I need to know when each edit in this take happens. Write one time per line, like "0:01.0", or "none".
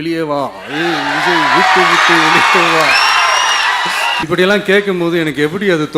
0:04.2